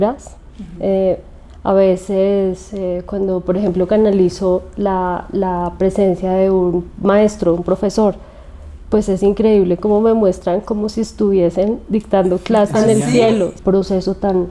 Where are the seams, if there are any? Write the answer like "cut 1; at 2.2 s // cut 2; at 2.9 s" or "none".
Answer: cut 1; at 13.5 s

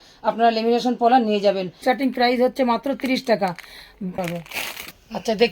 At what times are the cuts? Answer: cut 1; at 1.8 s // cut 2; at 4.1 s

